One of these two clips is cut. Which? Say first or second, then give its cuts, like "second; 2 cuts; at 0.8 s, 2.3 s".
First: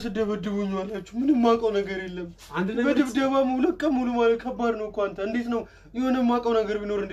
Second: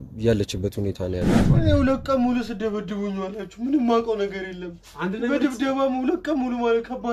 second; 1 cut; at 1.4 s